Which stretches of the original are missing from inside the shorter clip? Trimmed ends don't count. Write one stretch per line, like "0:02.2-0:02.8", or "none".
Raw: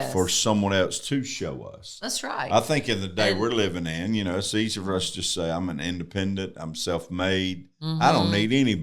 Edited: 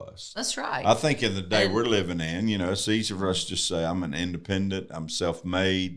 none